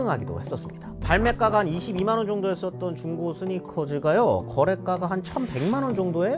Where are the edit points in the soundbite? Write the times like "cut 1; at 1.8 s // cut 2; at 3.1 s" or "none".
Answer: cut 1; at 1.0 s